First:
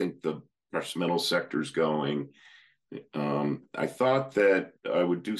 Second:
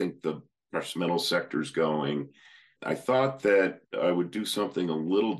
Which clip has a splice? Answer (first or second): second